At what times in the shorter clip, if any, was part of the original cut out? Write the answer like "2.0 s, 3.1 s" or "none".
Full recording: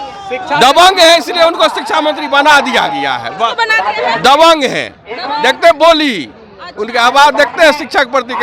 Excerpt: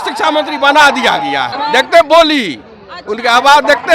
1.5 s